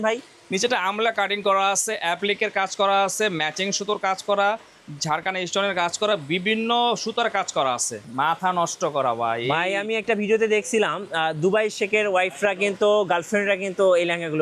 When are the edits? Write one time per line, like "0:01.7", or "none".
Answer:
0:08.0